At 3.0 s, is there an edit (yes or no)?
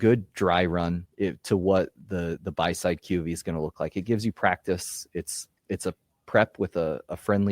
no